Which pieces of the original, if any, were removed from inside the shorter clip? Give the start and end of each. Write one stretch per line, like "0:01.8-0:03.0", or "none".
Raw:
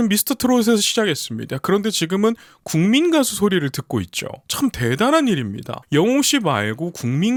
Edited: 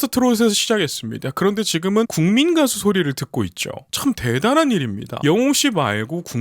0:02.4-0:02.7
0:05.6-0:05.7